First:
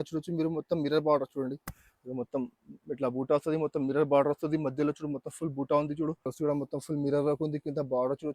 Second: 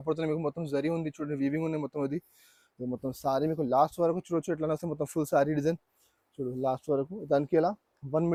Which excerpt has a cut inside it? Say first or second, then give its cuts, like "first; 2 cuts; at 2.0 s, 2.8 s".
first; 1 cut; at 6.3 s